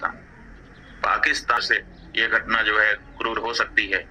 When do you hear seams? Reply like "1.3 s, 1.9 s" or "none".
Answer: 1.6 s